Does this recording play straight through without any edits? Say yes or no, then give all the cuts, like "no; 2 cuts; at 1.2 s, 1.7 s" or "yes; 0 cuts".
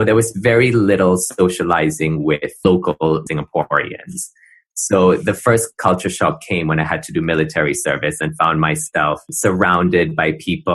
no; 1 cut; at 3.2 s